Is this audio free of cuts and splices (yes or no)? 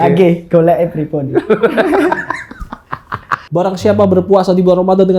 no